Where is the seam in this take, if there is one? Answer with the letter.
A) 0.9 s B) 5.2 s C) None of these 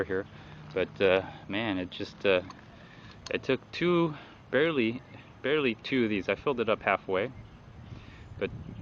B